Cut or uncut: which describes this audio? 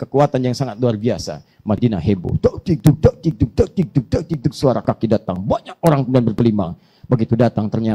uncut